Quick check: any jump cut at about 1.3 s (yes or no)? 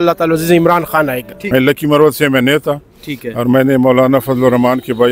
yes